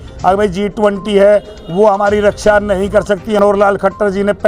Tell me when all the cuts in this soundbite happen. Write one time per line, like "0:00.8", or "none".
0:03.4